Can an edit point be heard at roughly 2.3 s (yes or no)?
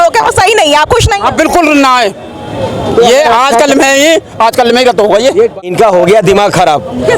no